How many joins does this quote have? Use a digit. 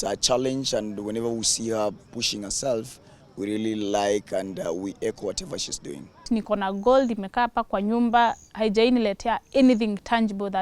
1